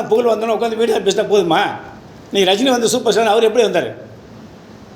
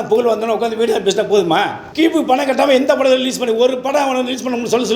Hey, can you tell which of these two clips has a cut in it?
second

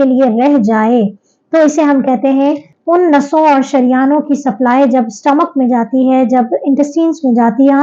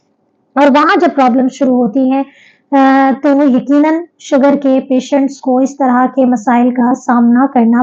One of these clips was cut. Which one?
first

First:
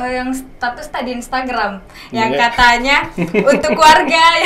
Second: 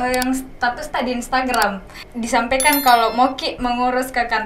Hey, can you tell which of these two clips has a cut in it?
second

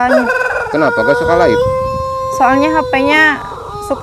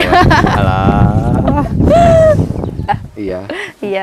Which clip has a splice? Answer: second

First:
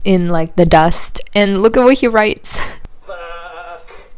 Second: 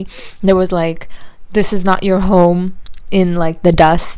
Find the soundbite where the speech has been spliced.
first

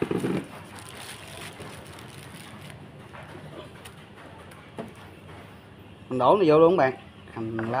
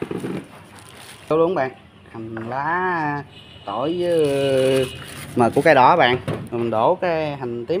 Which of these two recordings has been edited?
second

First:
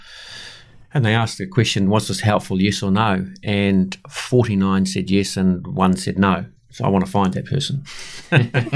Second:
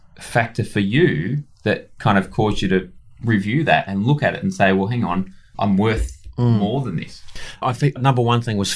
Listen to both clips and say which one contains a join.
second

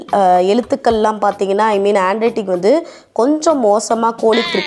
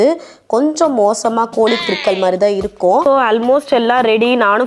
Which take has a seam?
second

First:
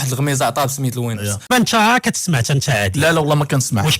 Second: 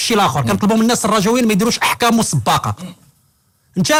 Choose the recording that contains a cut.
first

